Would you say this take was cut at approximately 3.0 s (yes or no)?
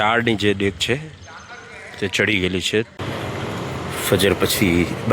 yes